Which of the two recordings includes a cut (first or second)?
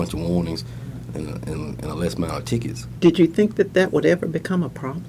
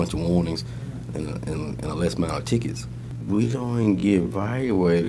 first